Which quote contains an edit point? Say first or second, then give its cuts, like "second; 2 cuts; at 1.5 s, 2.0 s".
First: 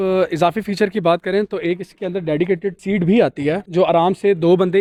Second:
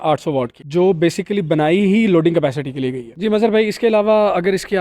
second; 1 cut; at 3.0 s